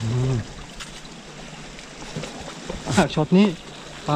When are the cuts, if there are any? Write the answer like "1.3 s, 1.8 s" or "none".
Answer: 3.0 s